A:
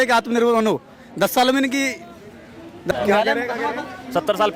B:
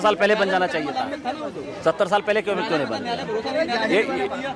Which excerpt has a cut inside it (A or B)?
A